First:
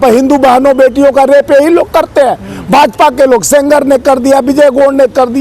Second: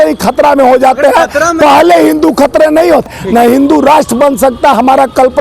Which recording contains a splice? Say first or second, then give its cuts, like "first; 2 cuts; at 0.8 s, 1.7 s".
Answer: second; 1 cut; at 3.2 s